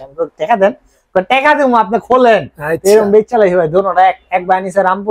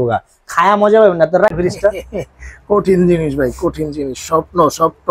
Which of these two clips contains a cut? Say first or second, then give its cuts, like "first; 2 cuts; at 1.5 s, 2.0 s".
second; 1 cut; at 1.5 s